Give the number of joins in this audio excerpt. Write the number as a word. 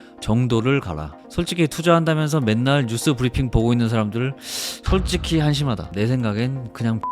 two